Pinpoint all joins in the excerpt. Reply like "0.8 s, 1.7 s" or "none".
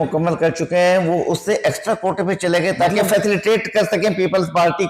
none